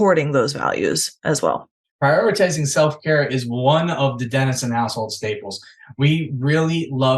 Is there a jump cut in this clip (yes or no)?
yes